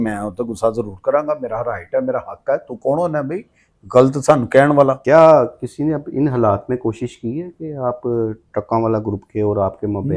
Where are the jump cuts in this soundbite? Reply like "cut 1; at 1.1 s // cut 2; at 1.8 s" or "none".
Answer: cut 1; at 5.0 s